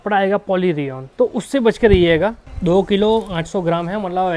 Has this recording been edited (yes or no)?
yes